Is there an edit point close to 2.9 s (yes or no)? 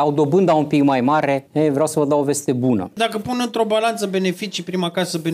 yes